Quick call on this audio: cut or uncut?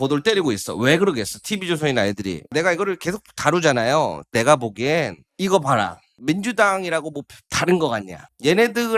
uncut